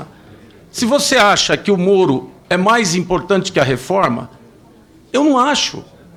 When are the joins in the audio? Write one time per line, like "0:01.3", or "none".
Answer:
none

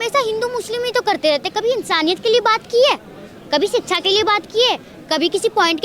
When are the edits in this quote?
none

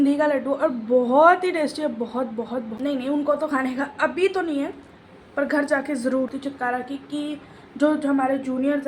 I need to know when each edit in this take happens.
0:02.7
0:06.3

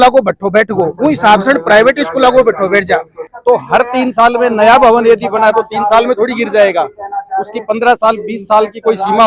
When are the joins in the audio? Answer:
0:03.2

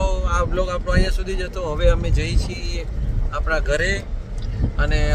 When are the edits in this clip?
none

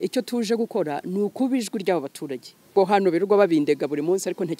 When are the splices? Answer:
0:02.7

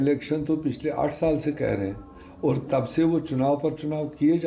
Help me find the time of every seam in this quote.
none

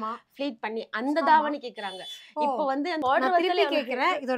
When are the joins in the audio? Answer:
0:03.0

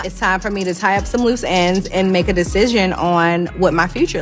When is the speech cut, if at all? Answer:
none

